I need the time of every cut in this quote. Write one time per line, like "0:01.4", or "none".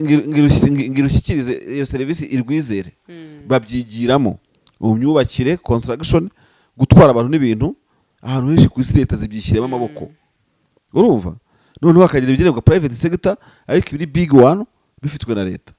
none

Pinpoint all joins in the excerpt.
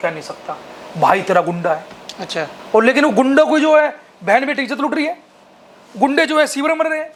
none

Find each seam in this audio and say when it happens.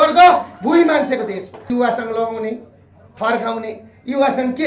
0:01.7

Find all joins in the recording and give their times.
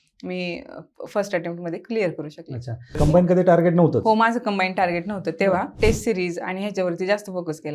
0:02.9
0:05.7

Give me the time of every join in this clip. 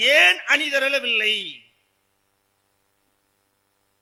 none

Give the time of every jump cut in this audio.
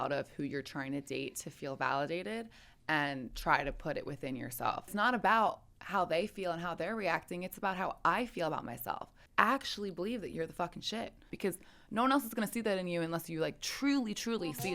0:04.9
0:09.2
0:11.3

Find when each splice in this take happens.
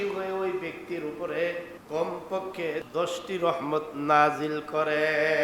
0:01.7
0:02.9

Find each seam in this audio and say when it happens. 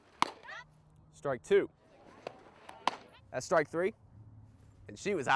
0:01.8

